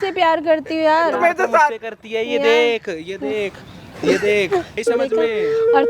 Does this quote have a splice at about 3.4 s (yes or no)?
no